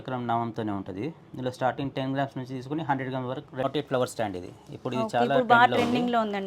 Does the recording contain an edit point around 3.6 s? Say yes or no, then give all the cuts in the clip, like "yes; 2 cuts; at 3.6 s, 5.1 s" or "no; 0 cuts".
yes; 1 cut; at 3.6 s